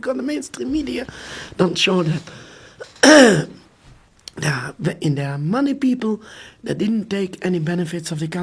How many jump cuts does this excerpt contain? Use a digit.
0